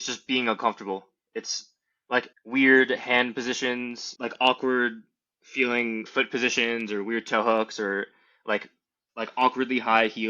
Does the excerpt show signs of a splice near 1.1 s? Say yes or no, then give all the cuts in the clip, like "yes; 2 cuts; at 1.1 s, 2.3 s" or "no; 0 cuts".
no; 3 cuts; at 2.3 s, 4.0 s, 6.1 s